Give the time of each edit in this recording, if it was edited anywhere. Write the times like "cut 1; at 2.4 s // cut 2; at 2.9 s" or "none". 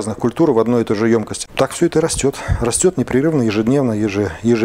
cut 1; at 1.4 s